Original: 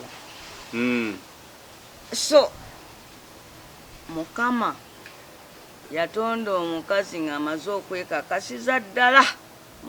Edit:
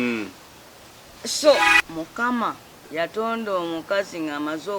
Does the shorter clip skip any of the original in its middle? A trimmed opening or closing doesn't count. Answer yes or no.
yes